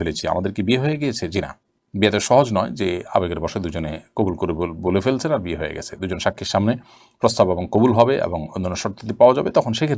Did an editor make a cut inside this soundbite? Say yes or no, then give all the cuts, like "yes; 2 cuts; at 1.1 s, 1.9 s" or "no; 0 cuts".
no; 0 cuts